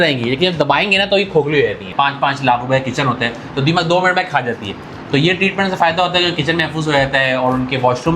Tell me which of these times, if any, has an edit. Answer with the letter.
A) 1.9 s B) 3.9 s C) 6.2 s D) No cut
A